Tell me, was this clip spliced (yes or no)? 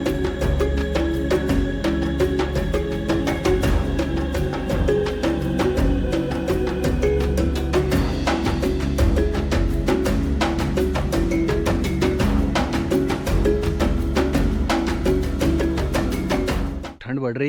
no